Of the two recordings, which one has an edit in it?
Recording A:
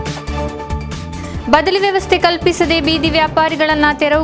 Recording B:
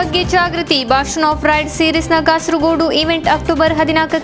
A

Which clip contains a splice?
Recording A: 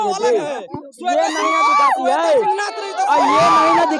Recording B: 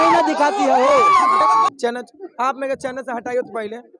B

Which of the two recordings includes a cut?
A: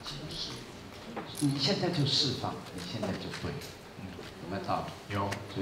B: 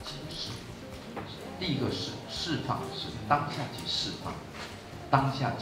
A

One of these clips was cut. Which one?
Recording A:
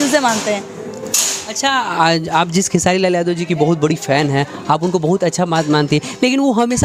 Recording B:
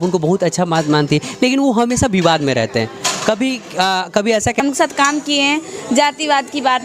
B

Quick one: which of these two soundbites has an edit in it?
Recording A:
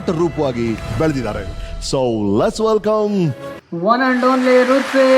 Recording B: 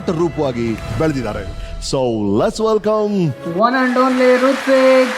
B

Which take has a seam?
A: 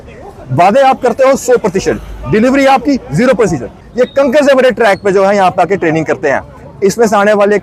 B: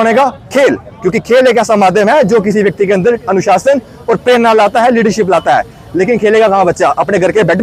A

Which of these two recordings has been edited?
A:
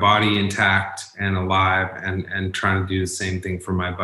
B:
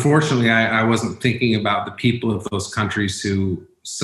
A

